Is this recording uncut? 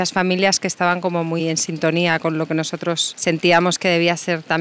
yes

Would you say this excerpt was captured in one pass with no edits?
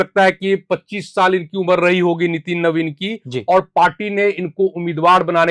yes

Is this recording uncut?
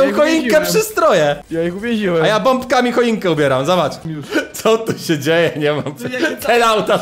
no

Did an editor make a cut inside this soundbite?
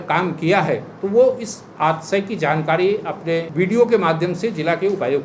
yes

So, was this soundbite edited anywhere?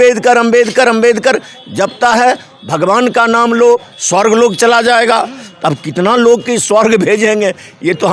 no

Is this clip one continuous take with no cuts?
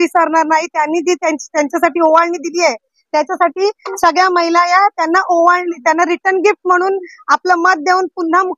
yes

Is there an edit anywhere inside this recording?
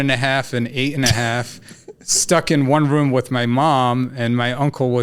no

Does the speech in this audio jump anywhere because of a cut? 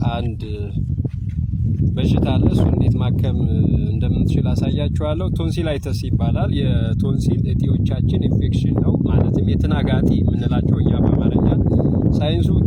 no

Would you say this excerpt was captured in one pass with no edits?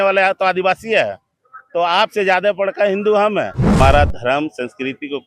no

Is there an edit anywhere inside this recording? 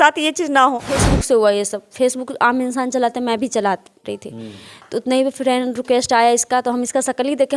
yes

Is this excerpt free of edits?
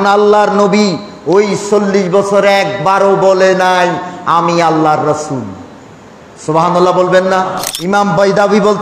no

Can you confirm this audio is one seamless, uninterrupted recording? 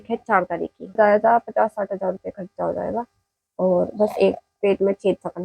no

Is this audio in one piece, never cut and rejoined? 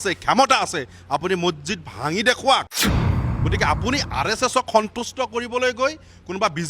no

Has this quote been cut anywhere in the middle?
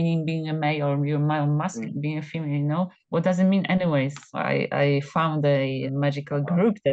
yes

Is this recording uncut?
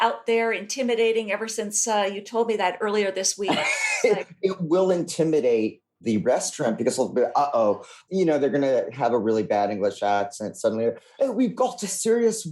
no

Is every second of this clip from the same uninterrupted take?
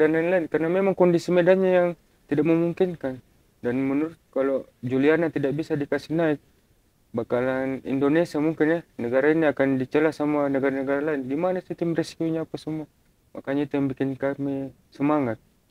yes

